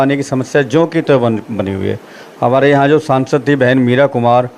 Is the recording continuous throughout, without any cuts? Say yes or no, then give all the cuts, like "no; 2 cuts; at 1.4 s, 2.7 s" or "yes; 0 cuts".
yes; 0 cuts